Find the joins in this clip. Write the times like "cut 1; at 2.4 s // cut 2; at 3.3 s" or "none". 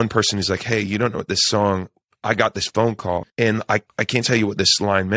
cut 1; at 3.5 s